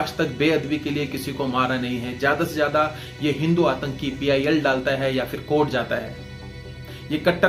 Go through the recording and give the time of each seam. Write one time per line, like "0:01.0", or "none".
none